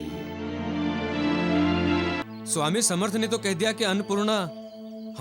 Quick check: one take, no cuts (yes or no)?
no